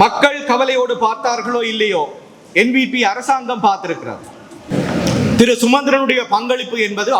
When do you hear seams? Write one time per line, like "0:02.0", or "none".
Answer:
0:04.7